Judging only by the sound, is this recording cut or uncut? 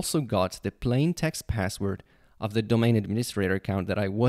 uncut